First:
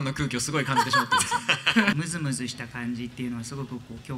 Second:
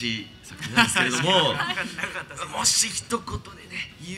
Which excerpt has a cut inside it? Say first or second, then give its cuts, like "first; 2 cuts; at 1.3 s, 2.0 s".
first; 1 cut; at 1.9 s